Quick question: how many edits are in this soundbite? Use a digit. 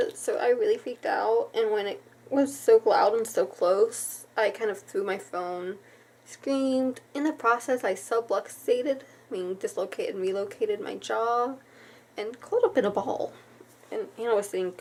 0